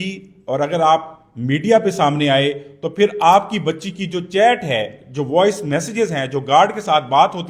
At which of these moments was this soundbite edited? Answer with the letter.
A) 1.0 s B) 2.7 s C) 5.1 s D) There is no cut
D